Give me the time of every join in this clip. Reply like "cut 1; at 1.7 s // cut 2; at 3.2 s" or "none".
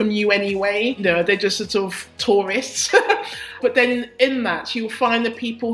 cut 1; at 1.0 s // cut 2; at 3.6 s